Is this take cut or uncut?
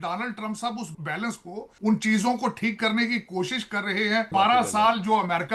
cut